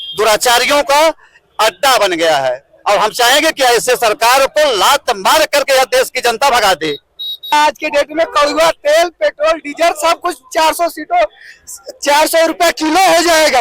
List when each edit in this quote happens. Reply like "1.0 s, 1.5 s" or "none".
7.5 s

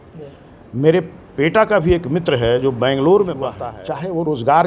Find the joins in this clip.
3.7 s

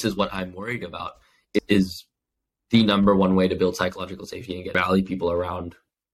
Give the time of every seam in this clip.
1.6 s, 4.7 s

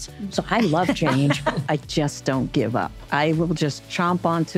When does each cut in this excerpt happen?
1.6 s, 3.0 s

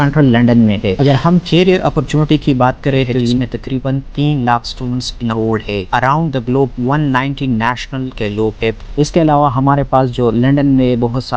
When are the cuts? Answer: 1.0 s, 3.4 s, 5.9 s, 8.8 s

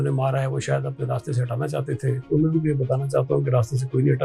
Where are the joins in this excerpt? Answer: 2.2 s

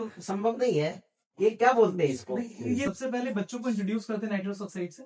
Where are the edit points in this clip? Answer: 2.8 s

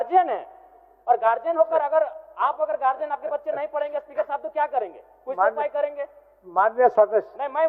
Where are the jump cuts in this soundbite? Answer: none

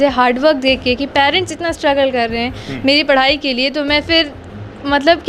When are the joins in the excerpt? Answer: none

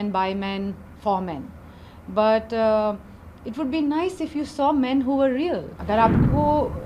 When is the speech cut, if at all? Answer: 5.7 s

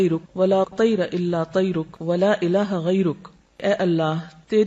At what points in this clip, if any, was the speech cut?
1.9 s, 3.6 s

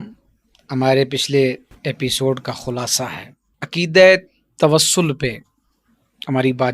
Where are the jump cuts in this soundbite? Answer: none

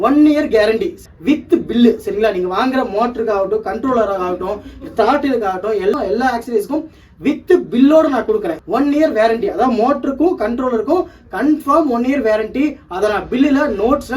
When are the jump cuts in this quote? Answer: 1.0 s, 8.6 s

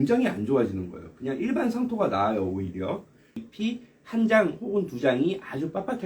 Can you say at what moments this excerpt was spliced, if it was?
3.4 s

